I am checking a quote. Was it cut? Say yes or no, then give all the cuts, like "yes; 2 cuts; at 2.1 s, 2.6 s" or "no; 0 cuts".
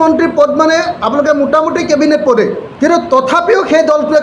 yes; 1 cut; at 2.6 s